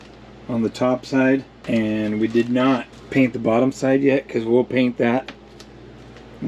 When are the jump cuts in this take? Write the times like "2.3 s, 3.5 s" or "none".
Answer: 1.5 s, 3.0 s